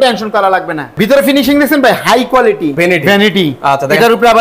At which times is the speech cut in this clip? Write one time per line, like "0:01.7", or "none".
0:01.0
0:02.7